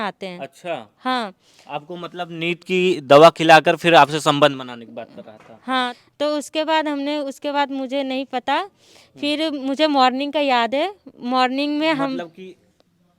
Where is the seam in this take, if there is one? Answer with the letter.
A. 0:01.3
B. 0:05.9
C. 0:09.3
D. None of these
B